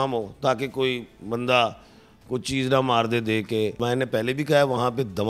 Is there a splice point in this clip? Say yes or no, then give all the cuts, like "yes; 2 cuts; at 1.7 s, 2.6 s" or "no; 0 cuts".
yes; 1 cut; at 3.8 s